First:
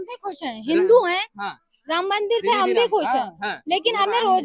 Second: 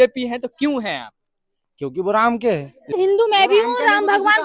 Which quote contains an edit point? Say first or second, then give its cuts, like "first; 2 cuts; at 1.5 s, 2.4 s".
second; 1 cut; at 2.9 s